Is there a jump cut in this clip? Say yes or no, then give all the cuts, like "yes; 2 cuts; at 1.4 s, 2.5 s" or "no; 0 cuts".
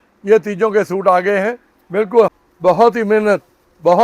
yes; 1 cut; at 2.3 s